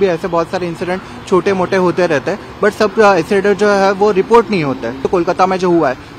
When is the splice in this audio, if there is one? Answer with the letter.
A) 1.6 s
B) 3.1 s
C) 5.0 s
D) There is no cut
C